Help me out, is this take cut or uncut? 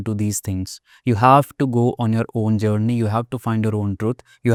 uncut